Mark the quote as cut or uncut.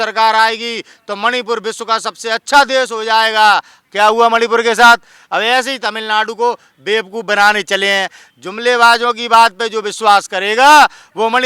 uncut